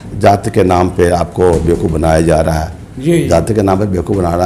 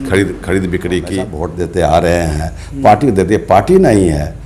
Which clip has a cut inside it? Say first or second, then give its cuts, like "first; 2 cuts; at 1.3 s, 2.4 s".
second; 1 cut; at 1.4 s